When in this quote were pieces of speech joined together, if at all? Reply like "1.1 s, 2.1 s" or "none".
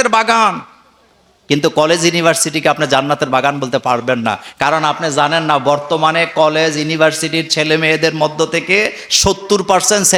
none